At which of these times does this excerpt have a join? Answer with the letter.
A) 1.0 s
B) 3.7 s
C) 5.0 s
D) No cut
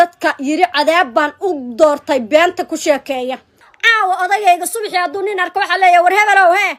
D